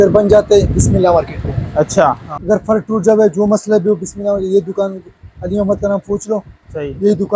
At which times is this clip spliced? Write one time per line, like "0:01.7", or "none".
0:02.3